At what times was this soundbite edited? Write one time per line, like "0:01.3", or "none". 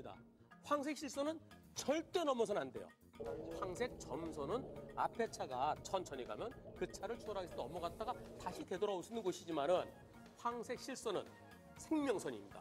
0:06.9